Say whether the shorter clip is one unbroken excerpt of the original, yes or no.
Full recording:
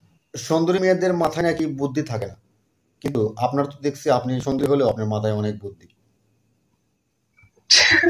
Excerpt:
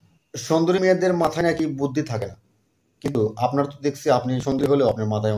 yes